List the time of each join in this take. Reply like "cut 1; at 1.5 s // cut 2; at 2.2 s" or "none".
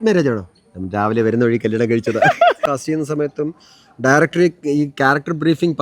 cut 1; at 2.5 s